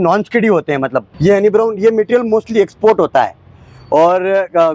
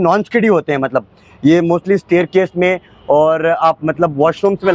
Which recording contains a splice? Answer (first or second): first